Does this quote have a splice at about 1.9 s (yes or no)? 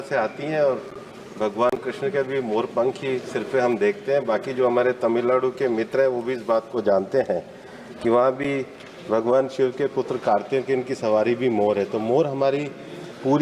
no